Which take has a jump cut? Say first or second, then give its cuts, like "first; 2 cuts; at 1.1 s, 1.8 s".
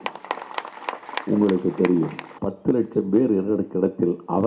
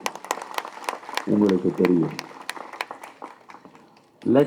first; 1 cut; at 2.3 s